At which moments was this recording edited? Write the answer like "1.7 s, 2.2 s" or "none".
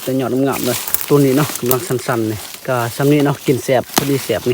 0.9 s, 2.5 s